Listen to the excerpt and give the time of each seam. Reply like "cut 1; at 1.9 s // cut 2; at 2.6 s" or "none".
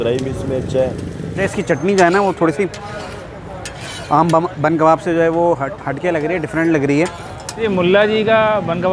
cut 1; at 1.4 s // cut 2; at 7.6 s